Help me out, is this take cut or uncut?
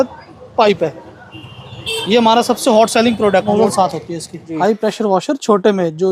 cut